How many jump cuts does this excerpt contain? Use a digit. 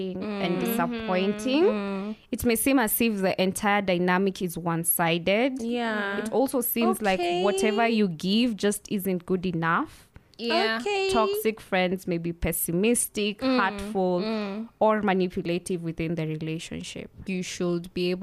1